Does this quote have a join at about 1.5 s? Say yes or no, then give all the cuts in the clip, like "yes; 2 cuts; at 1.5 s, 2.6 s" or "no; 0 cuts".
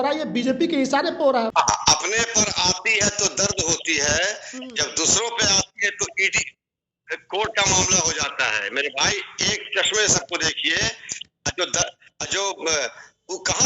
yes; 1 cut; at 1.5 s